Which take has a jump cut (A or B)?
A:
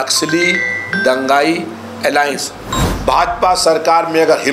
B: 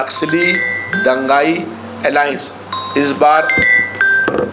A